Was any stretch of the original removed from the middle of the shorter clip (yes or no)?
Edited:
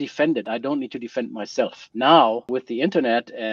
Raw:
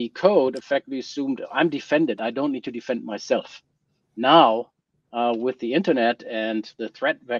yes